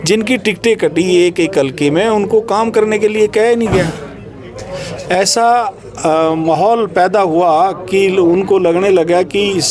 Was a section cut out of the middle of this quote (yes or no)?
no